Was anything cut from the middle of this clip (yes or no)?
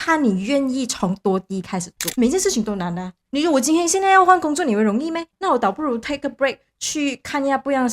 yes